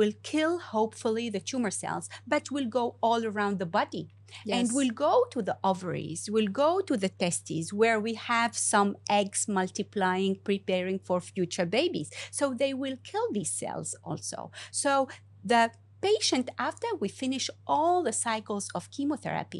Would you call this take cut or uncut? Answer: uncut